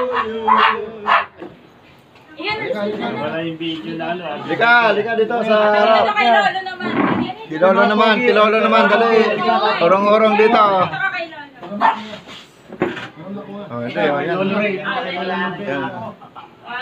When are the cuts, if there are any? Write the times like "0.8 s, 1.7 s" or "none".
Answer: 1.3 s